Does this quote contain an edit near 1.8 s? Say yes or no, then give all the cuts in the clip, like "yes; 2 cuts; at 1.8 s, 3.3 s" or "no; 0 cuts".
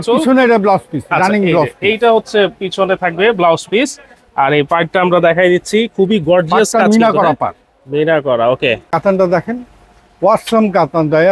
no; 1 cut; at 8.8 s